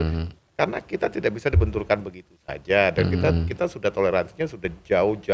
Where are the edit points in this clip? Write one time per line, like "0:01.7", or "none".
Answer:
none